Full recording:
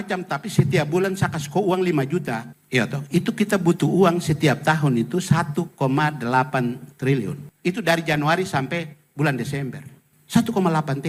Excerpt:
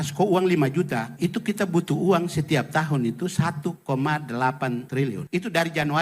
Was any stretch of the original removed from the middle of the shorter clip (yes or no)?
yes